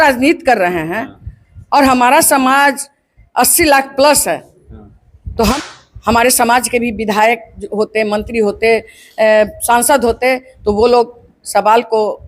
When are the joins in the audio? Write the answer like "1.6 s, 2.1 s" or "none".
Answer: 5.5 s